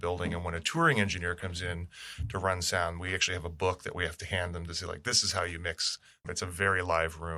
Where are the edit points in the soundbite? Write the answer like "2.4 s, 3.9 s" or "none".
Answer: 6.2 s